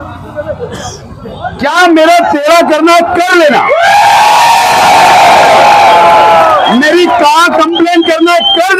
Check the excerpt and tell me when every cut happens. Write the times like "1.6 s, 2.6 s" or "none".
none